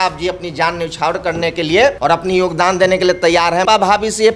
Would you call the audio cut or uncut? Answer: cut